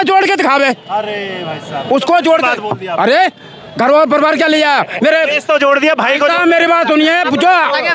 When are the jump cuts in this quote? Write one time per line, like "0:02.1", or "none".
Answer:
none